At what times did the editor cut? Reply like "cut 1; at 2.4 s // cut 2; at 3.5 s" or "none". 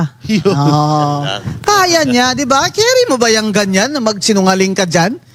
none